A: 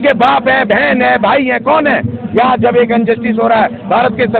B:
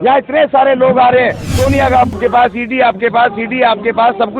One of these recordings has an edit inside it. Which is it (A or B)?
B